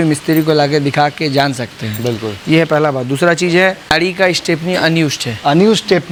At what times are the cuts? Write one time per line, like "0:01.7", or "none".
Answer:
none